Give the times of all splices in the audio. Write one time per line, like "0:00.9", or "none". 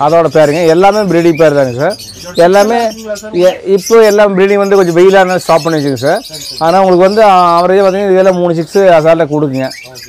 none

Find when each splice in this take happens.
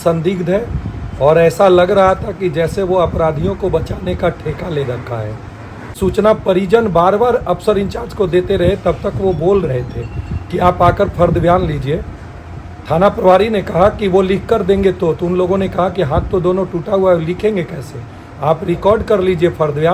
0:05.9

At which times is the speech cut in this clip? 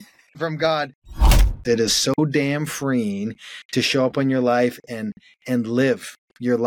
0:01.3

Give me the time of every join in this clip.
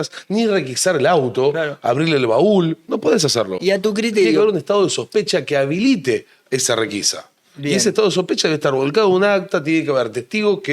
none

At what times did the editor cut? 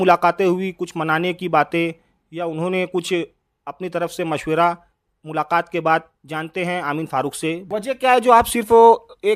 0:07.7

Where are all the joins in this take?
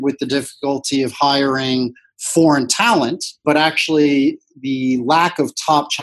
0:03.3

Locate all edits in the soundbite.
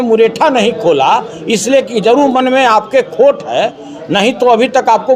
none

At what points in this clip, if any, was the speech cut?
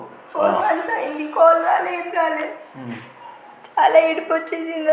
none

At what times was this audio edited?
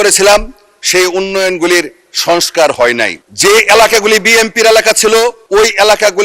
0:03.2

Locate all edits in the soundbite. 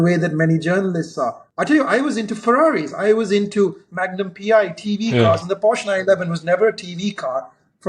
0:01.4

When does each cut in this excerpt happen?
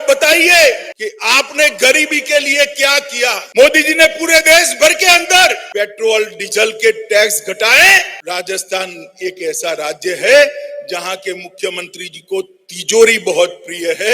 0:00.9
0:03.4
0:05.6
0:08.2

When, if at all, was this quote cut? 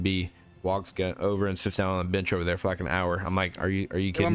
none

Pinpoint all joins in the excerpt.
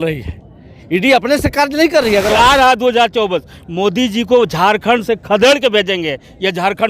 0:02.3
0:05.5

